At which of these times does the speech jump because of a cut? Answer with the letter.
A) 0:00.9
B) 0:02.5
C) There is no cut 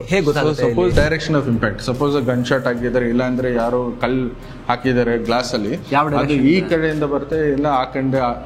A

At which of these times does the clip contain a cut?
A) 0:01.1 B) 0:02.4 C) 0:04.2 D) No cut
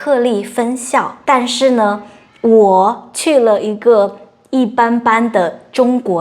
A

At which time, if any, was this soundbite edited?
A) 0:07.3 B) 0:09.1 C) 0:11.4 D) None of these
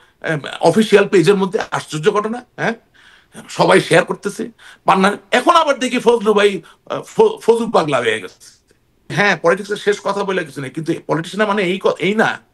B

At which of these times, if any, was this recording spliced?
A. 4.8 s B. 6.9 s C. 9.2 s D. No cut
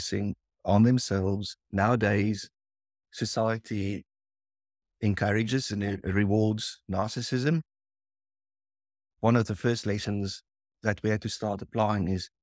C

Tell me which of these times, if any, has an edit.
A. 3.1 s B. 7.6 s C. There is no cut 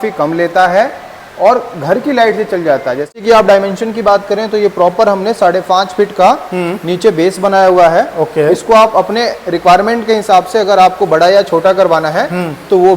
A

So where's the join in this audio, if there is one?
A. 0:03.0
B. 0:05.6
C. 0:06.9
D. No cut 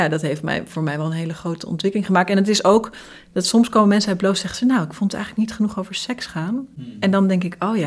C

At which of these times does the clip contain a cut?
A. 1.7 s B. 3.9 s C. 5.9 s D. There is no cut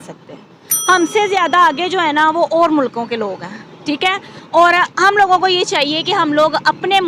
D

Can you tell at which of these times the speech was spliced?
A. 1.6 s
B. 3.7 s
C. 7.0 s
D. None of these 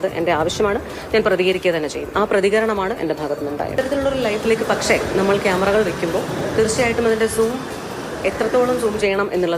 B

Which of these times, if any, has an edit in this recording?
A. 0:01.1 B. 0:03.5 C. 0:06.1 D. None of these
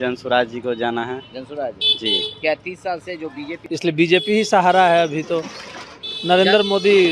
B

